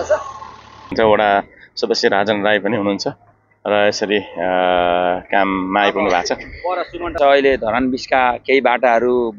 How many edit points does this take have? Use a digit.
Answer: 2